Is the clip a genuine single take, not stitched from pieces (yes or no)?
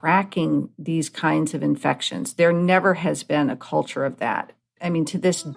yes